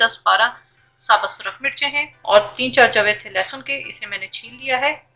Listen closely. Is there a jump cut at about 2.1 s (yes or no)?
yes